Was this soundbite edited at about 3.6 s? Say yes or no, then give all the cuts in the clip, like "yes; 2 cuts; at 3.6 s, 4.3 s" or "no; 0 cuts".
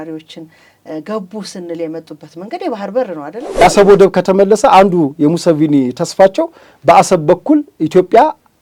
yes; 1 cut; at 3.6 s